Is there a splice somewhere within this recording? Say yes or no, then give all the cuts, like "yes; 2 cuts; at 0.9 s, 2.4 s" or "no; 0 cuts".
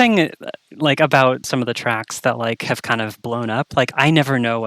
yes; 1 cut; at 1.5 s